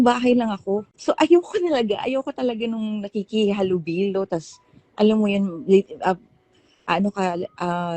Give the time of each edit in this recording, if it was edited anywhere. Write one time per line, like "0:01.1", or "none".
0:00.9